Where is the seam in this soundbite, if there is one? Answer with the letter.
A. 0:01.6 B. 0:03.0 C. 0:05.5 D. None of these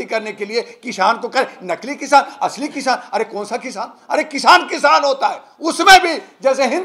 D